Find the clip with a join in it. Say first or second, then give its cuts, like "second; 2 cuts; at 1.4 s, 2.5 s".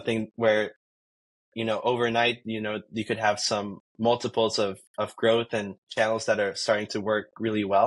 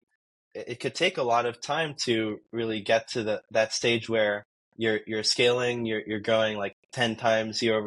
first; 1 cut; at 5.8 s